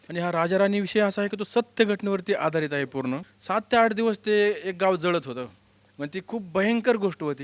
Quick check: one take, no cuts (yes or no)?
no